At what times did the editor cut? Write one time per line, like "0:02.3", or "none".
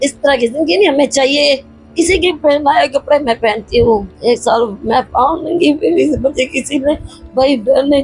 0:01.8
0:04.1